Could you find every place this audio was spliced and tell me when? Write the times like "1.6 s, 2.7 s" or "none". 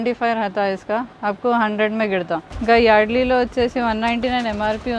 2.5 s